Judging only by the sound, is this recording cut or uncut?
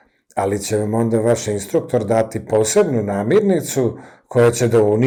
uncut